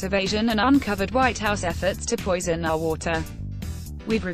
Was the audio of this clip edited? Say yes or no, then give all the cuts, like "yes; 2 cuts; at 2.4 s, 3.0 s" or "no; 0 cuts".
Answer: no; 0 cuts